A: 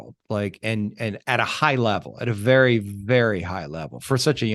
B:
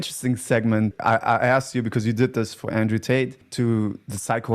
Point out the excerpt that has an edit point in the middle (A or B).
B